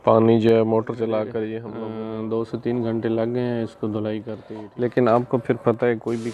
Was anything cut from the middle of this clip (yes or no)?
yes